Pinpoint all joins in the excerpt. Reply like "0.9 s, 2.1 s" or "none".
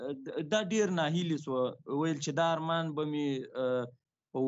none